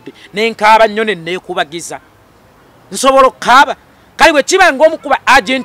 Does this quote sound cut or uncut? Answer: uncut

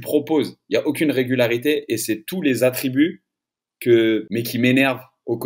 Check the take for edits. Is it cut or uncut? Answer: cut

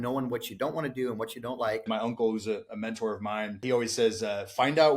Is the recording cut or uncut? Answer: cut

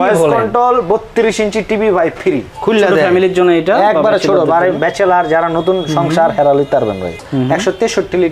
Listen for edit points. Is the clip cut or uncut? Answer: cut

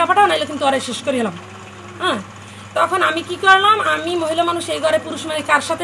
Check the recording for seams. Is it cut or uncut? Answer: uncut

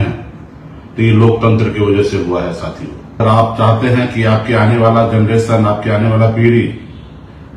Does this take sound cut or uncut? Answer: cut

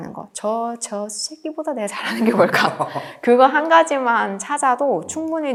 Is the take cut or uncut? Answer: uncut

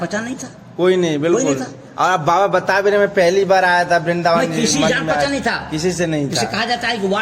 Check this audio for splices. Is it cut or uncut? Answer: uncut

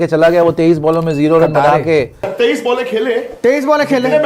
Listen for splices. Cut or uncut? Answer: cut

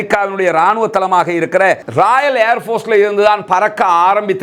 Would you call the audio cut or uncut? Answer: uncut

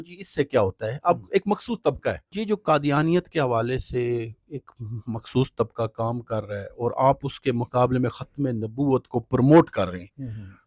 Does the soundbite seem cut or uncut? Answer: cut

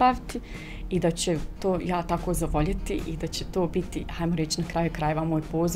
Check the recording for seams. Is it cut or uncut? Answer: uncut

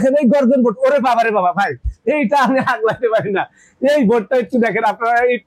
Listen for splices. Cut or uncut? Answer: uncut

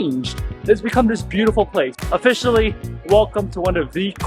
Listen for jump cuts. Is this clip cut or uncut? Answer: cut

